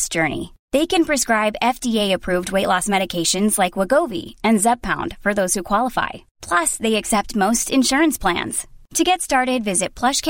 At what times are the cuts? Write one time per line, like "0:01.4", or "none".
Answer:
none